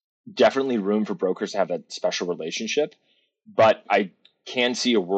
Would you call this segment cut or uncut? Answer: cut